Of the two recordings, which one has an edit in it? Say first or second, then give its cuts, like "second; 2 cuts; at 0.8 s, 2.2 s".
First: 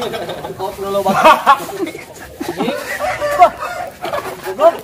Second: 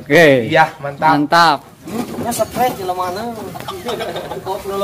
second; 1 cut; at 1.8 s